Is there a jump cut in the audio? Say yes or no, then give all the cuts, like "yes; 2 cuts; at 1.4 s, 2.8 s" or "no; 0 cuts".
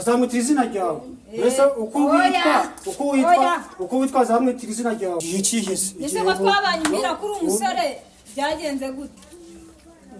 yes; 1 cut; at 5.2 s